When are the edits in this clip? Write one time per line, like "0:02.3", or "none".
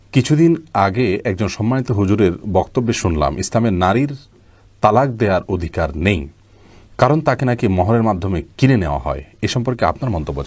none